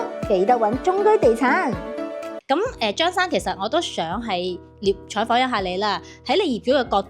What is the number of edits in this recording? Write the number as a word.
one